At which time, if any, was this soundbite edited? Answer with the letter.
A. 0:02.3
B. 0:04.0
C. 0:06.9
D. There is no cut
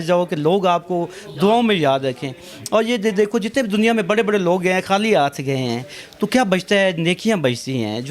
D